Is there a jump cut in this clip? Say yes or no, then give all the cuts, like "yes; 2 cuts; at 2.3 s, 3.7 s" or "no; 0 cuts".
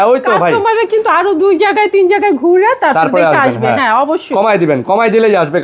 no; 0 cuts